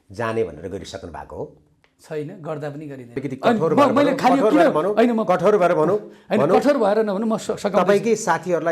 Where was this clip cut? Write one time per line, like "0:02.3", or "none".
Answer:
0:03.2